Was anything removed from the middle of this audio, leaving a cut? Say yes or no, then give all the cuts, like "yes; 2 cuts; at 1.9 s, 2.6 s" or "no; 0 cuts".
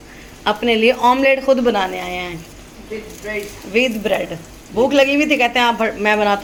no; 0 cuts